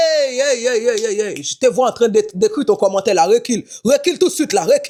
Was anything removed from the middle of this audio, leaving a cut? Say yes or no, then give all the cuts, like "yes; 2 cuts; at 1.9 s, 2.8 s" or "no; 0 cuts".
no; 0 cuts